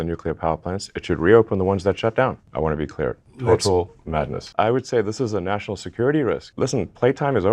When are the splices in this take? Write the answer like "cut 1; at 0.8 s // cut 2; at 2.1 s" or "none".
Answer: cut 1; at 2.4 s // cut 2; at 4.5 s // cut 3; at 6.5 s